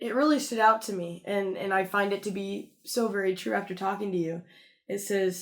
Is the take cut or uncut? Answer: uncut